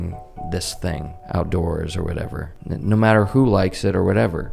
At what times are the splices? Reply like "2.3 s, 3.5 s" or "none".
1.1 s, 2.5 s